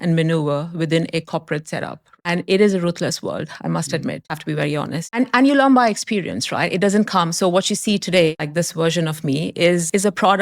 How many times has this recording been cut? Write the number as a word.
three